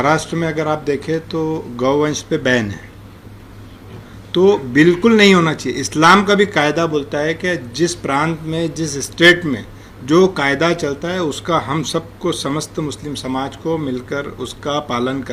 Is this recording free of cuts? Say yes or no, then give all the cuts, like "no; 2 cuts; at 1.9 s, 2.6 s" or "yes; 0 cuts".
yes; 0 cuts